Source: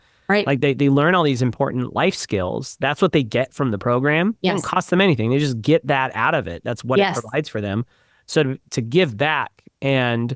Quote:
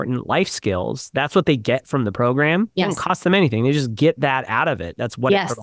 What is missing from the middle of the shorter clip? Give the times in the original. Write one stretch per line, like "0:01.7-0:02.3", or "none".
none